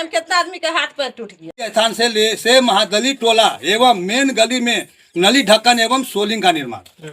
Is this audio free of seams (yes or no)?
no